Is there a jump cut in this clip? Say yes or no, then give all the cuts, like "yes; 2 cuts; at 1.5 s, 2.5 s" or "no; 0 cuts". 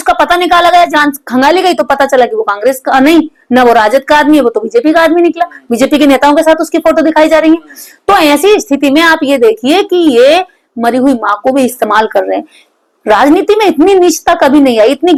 no; 0 cuts